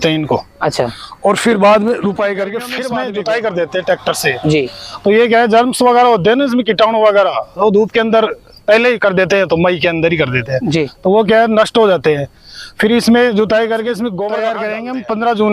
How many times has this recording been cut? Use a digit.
2